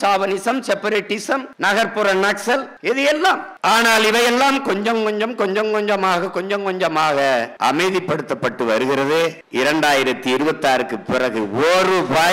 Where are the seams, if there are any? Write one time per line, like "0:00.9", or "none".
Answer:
none